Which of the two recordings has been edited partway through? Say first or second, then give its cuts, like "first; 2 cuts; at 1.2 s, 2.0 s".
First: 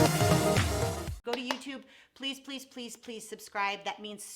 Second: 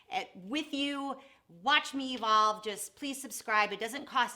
first; 1 cut; at 1.0 s